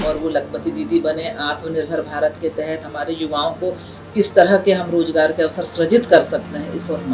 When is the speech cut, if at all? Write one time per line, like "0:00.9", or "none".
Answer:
none